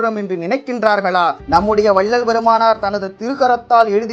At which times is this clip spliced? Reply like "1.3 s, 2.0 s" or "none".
1.4 s